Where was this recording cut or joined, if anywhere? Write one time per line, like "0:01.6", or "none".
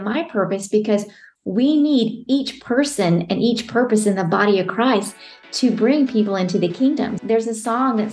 0:07.2